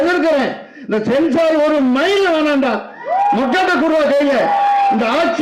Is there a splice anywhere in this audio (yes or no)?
no